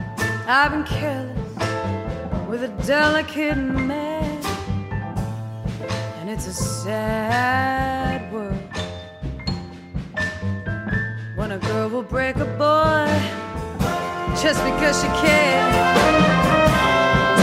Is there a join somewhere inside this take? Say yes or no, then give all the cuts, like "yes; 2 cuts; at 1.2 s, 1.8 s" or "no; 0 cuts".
no; 0 cuts